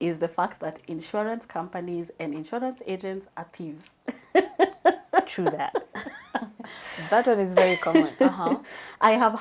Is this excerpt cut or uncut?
uncut